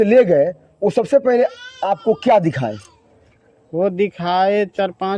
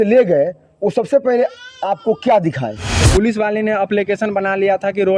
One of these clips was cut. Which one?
second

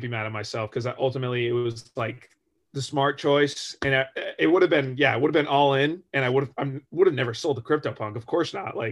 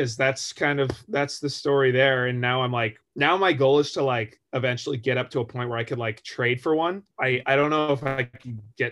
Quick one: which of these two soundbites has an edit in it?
second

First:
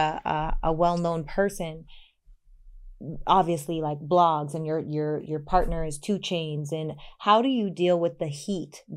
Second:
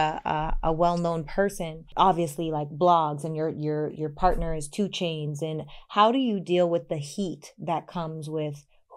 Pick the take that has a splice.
second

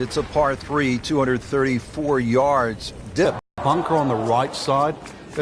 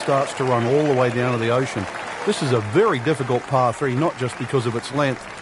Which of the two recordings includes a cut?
first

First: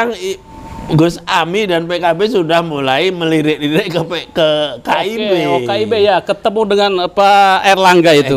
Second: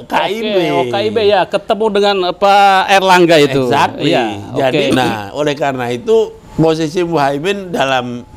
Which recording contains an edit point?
second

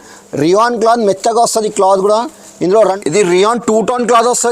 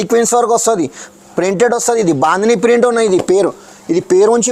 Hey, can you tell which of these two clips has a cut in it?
first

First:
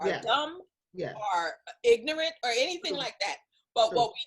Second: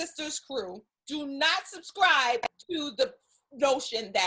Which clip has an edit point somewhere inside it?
second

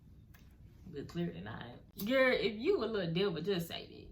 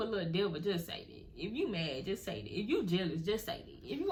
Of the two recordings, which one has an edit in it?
first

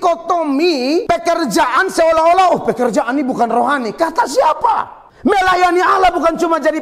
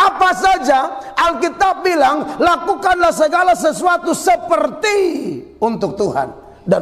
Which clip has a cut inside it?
first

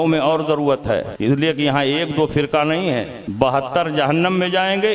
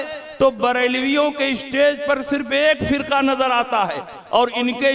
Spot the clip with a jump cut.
first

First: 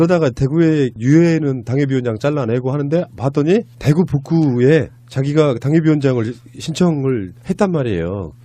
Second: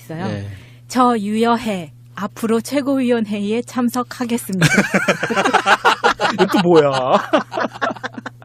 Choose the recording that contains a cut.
first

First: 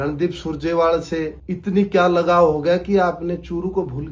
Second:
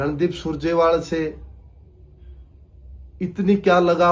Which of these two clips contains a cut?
first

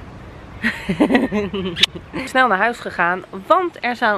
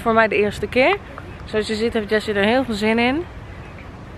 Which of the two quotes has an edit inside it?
first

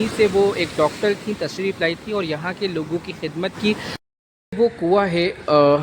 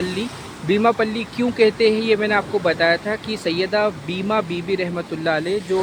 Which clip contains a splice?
first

